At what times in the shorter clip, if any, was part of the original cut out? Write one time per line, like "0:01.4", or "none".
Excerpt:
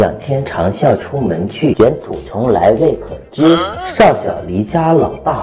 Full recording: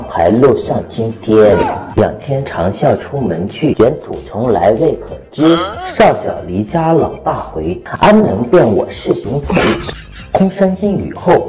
none